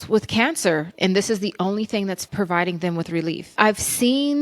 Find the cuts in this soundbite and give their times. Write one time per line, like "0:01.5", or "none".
0:00.9
0:02.3
0:03.5